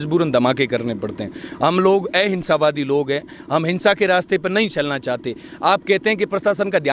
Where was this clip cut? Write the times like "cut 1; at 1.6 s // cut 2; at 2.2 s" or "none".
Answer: none